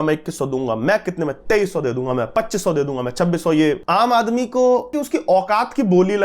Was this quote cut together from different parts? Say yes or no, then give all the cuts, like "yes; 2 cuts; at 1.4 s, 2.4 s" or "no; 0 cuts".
yes; 2 cuts; at 3.8 s, 5.0 s